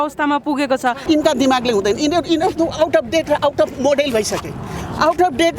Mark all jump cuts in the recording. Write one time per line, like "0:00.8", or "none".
0:01.0